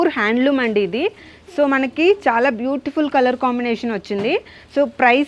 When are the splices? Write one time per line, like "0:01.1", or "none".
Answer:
none